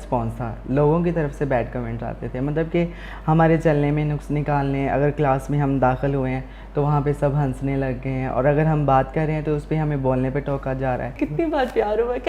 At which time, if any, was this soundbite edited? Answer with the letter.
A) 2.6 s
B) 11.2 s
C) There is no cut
B